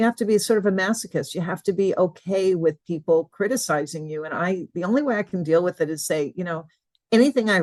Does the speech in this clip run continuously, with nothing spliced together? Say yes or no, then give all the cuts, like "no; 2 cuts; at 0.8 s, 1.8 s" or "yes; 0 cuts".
yes; 0 cuts